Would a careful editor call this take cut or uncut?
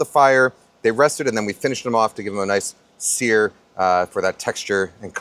uncut